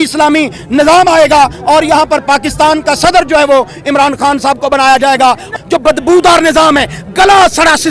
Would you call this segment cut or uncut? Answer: cut